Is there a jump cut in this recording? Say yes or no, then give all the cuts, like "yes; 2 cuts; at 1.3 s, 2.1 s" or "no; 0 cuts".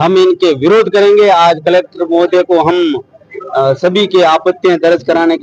no; 0 cuts